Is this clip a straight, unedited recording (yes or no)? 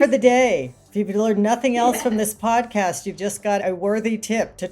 no